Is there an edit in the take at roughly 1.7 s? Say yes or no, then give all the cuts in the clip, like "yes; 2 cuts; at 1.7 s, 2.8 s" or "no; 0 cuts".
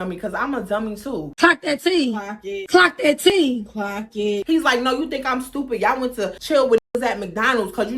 no; 2 cuts; at 4.4 s, 6.4 s